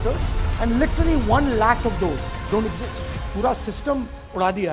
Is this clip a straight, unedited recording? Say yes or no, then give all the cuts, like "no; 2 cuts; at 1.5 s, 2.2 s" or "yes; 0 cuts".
yes; 0 cuts